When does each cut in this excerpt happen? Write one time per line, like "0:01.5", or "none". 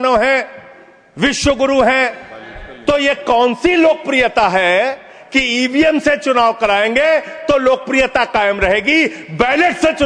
0:05.1